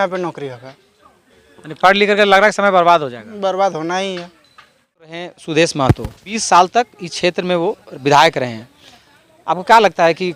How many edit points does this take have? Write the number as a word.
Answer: two